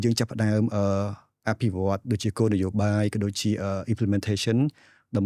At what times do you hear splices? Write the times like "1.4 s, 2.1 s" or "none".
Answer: none